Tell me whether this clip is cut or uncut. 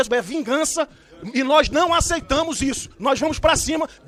uncut